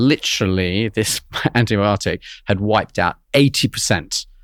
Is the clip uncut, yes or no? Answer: yes